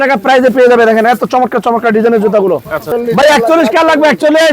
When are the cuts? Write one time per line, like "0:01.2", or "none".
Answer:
0:02.8